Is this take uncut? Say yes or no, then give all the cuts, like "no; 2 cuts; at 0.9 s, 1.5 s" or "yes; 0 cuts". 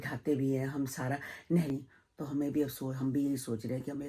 no; 1 cut; at 1.7 s